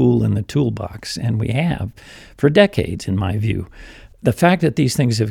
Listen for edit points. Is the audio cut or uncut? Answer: uncut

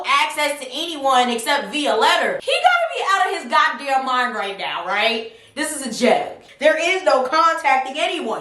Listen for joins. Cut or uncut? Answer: cut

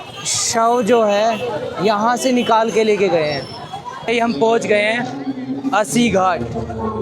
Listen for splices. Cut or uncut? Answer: cut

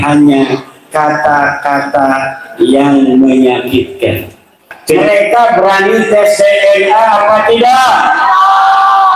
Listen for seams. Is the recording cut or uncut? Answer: cut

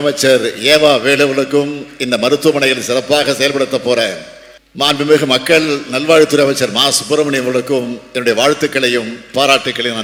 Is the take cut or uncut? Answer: uncut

